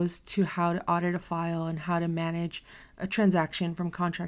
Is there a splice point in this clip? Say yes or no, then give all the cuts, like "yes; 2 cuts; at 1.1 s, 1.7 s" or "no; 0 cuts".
no; 0 cuts